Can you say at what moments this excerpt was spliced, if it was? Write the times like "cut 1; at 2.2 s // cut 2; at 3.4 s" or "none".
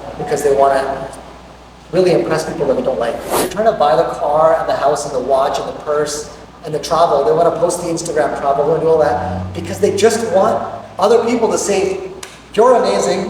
cut 1; at 3.5 s

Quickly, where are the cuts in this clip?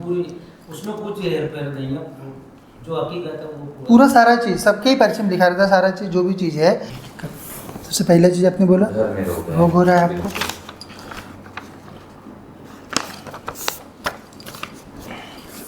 cut 1; at 6.9 s

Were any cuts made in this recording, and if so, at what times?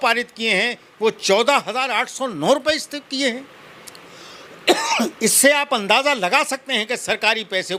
none

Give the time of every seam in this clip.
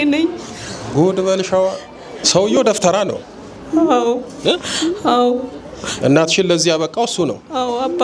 cut 1; at 2.2 s

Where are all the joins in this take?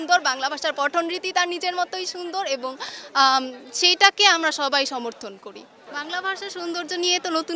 none

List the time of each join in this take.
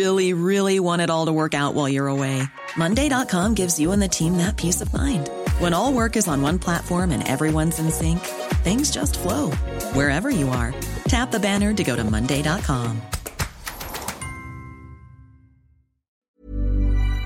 cut 1; at 16.2 s

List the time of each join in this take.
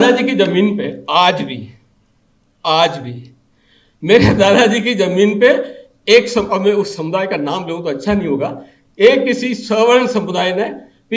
none

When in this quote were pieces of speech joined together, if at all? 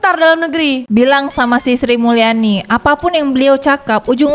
none

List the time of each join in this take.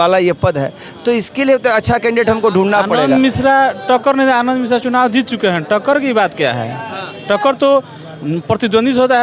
cut 1; at 3.0 s

